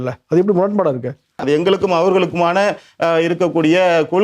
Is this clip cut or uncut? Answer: cut